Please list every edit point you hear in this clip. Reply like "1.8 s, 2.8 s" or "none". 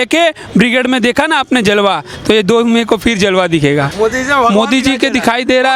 3.9 s